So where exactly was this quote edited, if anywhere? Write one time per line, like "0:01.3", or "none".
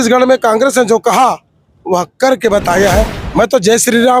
0:03.2

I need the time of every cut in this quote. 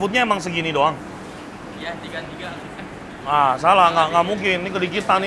0:02.6

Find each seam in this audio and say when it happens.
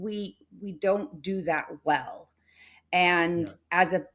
none

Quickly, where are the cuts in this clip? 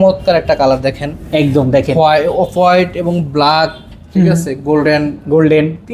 none

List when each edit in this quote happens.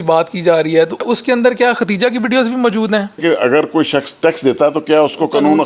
0:01.0
0:03.2

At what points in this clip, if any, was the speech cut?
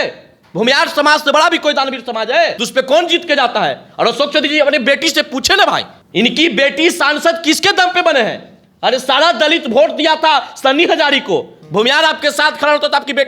0:02.6
0:06.0

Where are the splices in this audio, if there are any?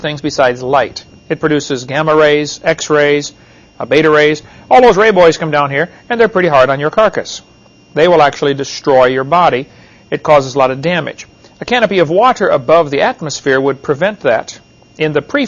0:07.5

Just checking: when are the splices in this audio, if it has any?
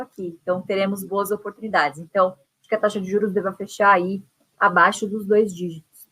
0:02.5

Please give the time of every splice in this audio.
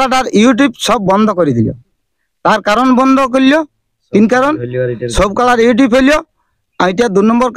none

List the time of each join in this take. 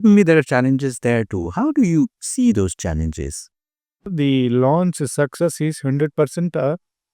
0:04.1

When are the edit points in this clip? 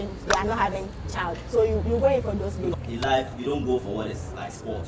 0:02.7

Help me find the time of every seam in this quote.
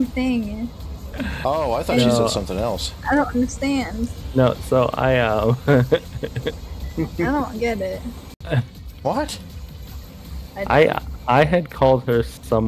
0:08.3

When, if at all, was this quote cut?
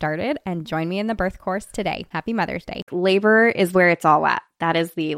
0:02.9

